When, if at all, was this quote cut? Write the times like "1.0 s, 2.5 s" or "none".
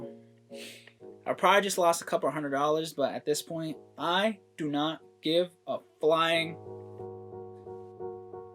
6.7 s